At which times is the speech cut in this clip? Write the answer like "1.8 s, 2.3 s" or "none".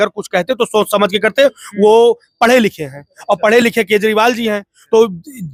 none